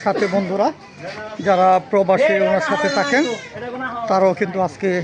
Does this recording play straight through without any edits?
yes; 0 cuts

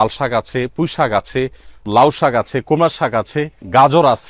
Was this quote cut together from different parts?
yes; 1 cut; at 1.9 s

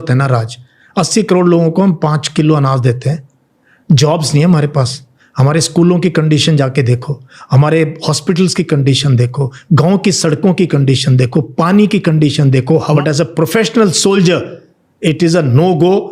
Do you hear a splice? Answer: yes; 1 cut; at 13.0 s

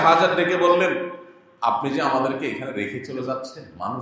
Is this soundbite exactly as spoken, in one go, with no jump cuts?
yes; 0 cuts

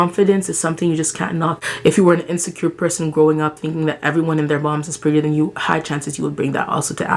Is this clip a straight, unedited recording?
no; 1 cut; at 1.6 s

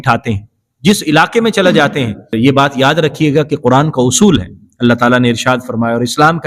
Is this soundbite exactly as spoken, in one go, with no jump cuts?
no; 1 cut; at 2.3 s

